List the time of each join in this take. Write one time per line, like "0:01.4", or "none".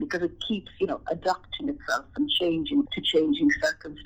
0:03.0